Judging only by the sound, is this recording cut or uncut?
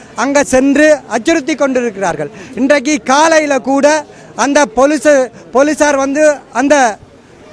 uncut